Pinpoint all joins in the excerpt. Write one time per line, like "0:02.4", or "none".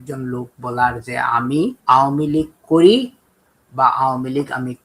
0:01.8